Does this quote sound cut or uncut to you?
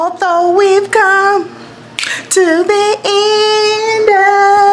uncut